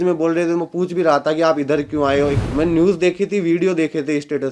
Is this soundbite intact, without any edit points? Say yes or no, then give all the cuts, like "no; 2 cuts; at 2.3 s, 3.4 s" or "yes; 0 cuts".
no; 1 cut; at 2.4 s